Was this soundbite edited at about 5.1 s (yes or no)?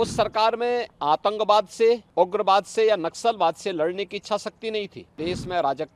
yes